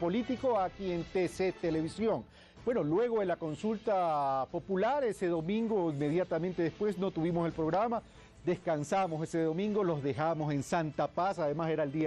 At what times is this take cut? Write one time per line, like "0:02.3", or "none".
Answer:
none